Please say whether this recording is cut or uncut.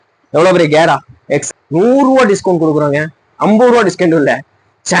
cut